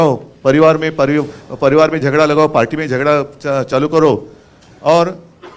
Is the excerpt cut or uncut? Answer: uncut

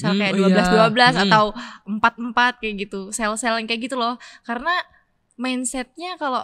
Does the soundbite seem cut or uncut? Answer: uncut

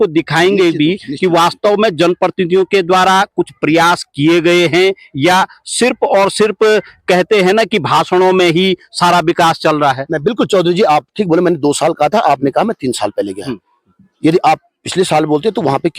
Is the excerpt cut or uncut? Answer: uncut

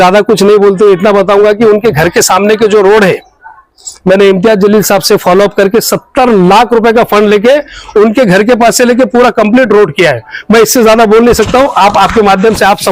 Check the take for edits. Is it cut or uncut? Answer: uncut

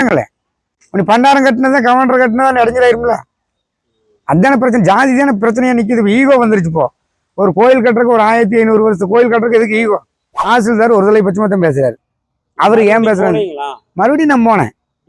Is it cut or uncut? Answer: cut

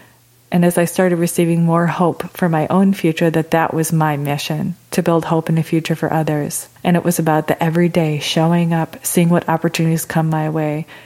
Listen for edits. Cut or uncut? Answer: cut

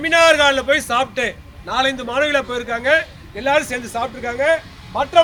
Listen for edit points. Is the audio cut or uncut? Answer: uncut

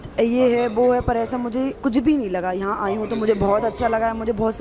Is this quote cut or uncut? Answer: uncut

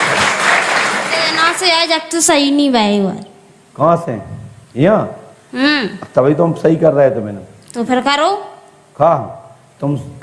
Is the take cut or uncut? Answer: cut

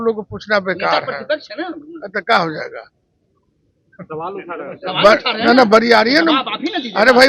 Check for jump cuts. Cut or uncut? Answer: uncut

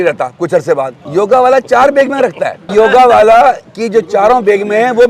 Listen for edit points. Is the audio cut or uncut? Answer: cut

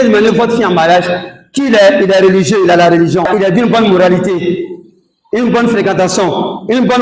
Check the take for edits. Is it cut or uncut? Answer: cut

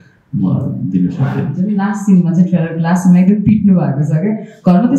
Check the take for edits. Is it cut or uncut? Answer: cut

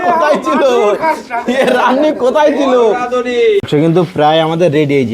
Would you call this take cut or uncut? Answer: cut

